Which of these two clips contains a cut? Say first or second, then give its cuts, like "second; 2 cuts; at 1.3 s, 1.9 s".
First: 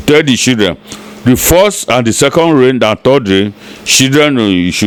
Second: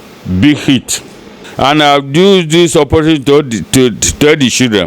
second; 1 cut; at 1.4 s